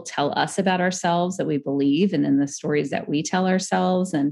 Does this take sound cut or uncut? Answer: uncut